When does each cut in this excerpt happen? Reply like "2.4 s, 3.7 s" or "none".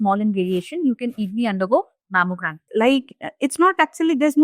2.7 s

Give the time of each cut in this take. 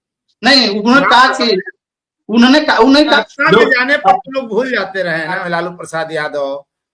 3.2 s, 5.4 s

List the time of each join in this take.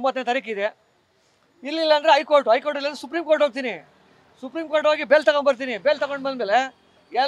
none

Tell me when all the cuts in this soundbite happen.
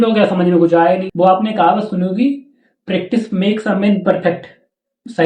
1.1 s

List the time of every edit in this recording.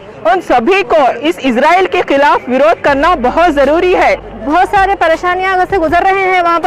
4.3 s

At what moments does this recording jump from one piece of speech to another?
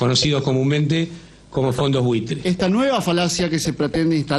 2.4 s

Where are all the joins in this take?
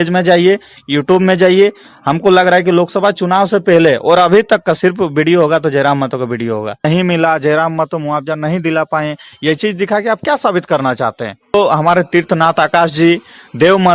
6.9 s, 11.5 s

